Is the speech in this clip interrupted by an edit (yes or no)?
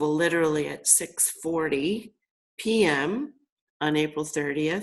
no